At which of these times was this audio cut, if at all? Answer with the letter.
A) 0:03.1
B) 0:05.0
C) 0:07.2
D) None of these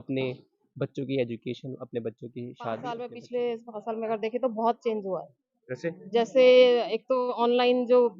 A